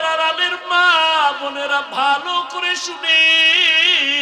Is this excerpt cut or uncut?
uncut